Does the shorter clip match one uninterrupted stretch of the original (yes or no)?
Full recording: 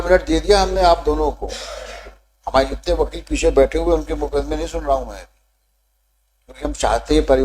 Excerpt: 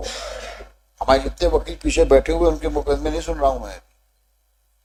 yes